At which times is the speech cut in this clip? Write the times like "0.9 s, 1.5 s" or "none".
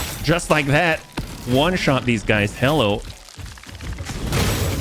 2.5 s